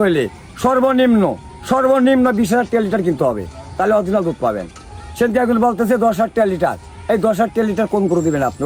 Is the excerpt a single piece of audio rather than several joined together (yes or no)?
yes